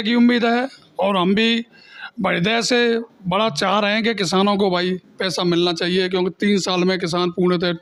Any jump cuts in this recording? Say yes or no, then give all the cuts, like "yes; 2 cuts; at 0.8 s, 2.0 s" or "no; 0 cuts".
no; 0 cuts